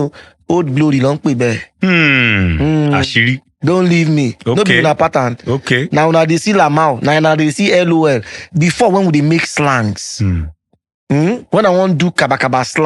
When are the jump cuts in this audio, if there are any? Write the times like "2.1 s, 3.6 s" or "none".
none